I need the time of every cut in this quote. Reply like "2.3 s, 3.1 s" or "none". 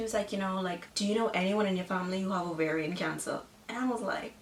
none